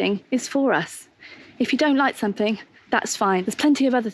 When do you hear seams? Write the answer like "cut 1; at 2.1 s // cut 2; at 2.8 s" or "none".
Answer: none